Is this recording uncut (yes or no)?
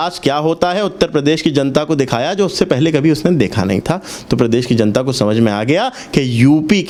yes